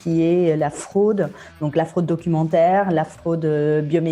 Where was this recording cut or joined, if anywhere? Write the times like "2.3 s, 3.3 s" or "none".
3.2 s